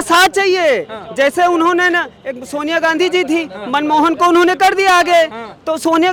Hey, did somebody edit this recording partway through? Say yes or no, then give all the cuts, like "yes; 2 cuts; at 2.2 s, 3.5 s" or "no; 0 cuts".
no; 0 cuts